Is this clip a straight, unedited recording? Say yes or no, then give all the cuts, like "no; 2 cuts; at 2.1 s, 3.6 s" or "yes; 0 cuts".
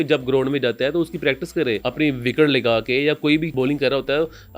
no; 2 cuts; at 1.9 s, 3.5 s